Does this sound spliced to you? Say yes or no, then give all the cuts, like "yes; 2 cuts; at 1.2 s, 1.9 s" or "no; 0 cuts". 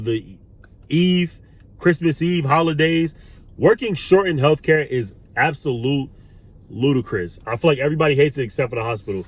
yes; 1 cut; at 7.3 s